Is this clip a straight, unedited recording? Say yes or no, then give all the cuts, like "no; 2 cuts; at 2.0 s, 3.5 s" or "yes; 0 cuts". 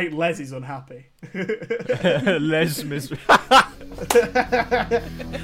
yes; 0 cuts